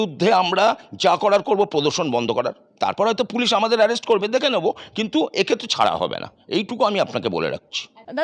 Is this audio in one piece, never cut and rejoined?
yes; 0 cuts

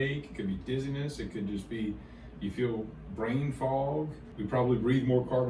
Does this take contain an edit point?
yes; 1 cut; at 4.3 s

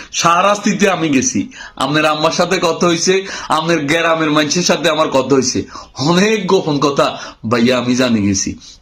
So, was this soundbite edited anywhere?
no; 0 cuts

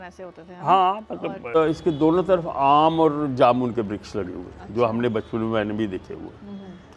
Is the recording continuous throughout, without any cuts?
no; 1 cut; at 1.6 s

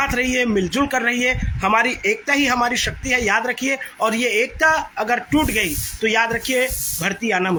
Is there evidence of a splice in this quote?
no; 0 cuts

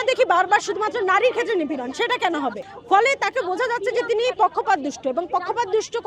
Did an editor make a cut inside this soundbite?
no; 0 cuts

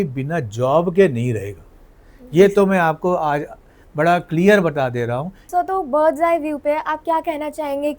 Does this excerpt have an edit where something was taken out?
yes; 1 cut; at 5.3 s

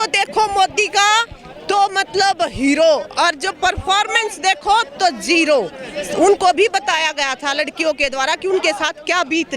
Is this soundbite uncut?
yes; 0 cuts

